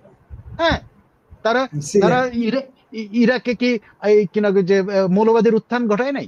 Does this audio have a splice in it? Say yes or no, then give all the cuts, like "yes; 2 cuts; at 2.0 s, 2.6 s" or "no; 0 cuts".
no; 0 cuts